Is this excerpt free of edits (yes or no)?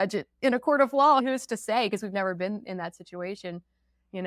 no